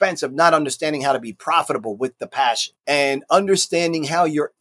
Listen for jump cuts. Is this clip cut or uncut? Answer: cut